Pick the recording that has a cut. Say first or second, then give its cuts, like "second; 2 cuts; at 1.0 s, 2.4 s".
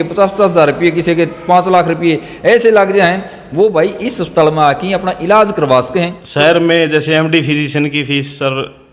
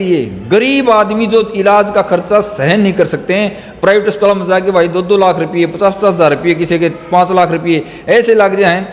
first; 1 cut; at 6.2 s